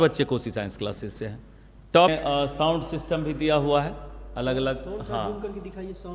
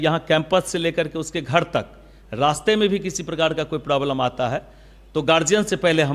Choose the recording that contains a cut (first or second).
first